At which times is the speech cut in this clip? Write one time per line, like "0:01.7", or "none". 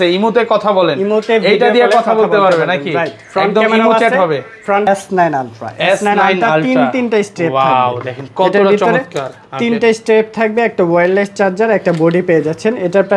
0:04.8